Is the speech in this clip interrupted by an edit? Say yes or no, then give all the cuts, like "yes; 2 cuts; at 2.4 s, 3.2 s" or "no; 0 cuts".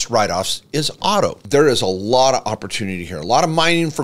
yes; 1 cut; at 1.4 s